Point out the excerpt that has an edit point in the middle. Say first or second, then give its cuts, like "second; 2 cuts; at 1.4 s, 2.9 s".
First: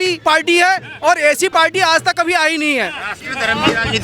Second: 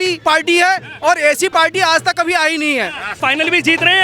second; 1 cut; at 3.1 s